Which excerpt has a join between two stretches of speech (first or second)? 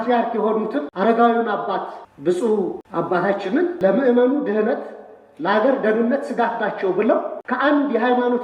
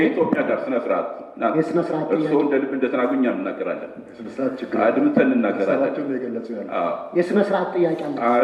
first